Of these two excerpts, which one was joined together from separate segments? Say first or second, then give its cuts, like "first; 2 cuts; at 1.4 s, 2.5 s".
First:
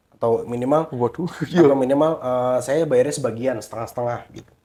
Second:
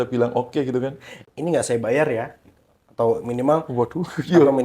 second; 1 cut; at 1.2 s